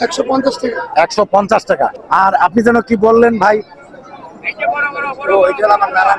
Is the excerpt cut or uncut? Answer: cut